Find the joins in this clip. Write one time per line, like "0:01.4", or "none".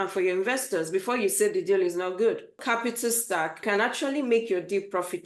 0:02.6
0:03.6